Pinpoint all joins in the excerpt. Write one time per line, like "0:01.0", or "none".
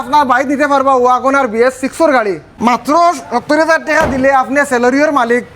0:02.5